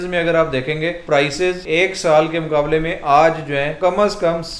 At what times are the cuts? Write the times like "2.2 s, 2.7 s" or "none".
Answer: 1.0 s, 1.6 s, 3.7 s